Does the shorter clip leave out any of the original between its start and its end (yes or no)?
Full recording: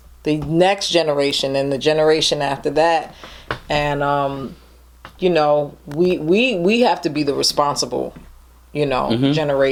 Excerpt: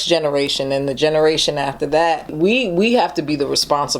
yes